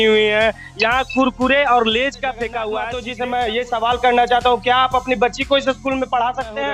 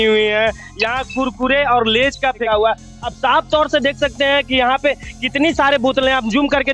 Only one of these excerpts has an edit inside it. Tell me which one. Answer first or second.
first